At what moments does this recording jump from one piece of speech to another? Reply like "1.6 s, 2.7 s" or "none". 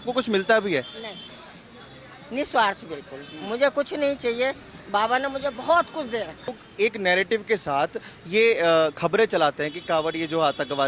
6.6 s